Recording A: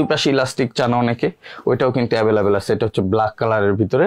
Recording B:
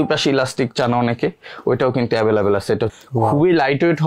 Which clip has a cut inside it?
B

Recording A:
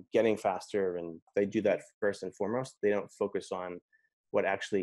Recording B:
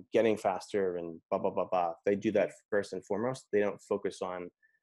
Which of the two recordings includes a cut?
A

